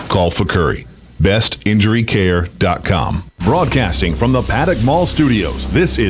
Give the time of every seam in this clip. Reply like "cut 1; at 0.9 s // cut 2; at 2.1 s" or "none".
cut 1; at 3.3 s